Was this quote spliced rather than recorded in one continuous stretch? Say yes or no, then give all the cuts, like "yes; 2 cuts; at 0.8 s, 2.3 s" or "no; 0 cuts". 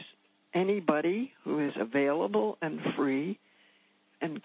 no; 0 cuts